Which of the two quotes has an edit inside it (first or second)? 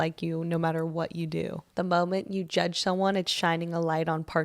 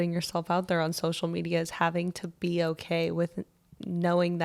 first